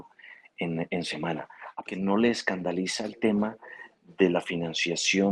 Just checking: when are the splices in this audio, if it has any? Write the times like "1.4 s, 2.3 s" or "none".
1.6 s

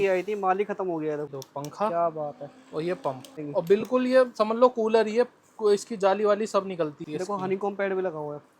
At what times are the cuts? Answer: 1.3 s, 3.4 s, 7.0 s

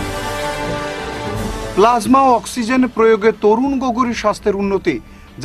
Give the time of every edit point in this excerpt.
1.2 s

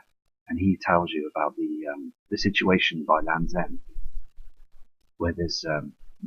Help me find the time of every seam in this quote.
none

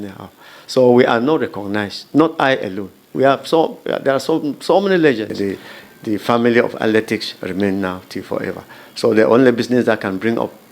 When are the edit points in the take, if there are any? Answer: 5.3 s

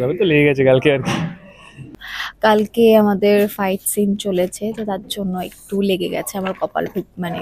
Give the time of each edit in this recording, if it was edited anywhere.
1.8 s

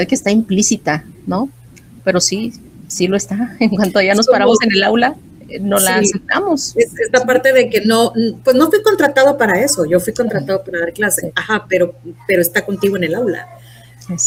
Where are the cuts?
none

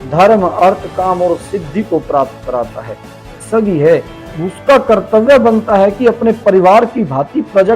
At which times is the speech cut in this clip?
3.3 s

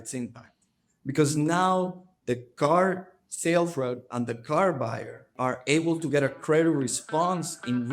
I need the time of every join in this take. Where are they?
5.3 s

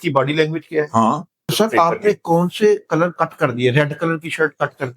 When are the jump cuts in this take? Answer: 1.4 s

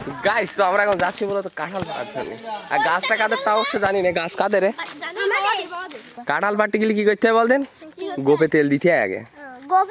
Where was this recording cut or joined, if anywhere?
6.1 s

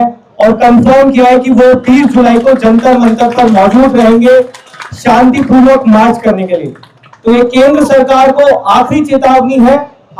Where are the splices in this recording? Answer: none

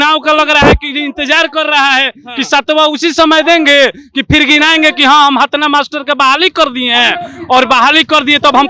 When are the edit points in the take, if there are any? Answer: none

